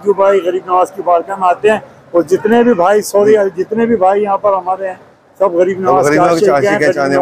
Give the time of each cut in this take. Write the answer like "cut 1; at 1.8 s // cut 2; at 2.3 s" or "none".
none